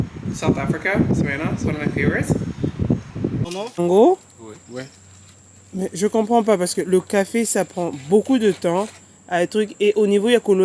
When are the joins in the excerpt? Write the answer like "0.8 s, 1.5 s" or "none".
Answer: 3.6 s